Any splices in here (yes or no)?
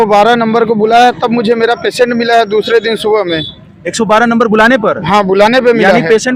no